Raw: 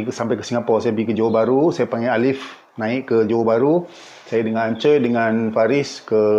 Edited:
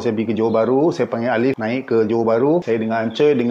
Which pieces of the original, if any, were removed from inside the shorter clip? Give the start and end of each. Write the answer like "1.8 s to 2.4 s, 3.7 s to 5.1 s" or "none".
2.4 s to 2.8 s, 3.8 s to 4.3 s